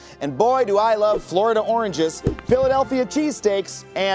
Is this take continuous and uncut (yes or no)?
yes